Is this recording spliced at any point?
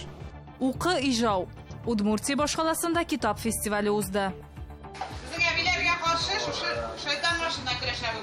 no; 0 cuts

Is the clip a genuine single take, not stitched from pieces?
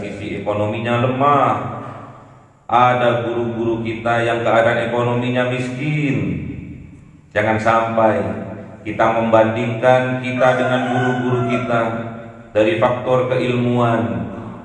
yes; 0 cuts

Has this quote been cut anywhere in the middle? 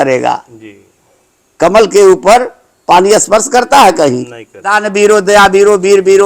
yes; 1 cut; at 4.8 s

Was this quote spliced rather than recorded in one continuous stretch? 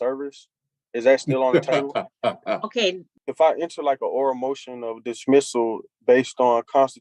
yes; 1 cut; at 3.1 s

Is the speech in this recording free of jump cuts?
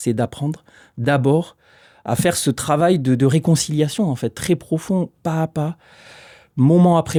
yes; 0 cuts

